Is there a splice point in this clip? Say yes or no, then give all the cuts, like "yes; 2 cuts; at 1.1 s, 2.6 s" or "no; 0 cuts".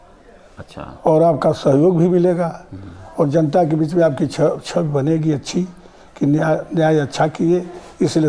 no; 0 cuts